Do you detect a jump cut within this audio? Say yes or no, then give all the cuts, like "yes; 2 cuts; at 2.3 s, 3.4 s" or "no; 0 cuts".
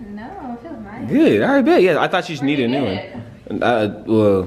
no; 0 cuts